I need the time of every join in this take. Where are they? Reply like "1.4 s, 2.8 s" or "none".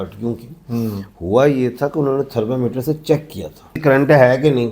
3.8 s